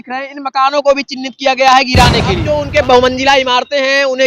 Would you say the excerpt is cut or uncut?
cut